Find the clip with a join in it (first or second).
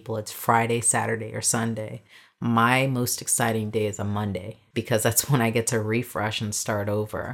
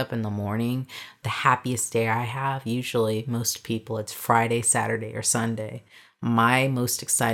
first